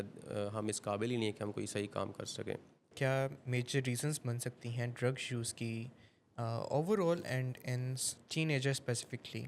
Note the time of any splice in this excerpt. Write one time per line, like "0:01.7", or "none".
0:02.9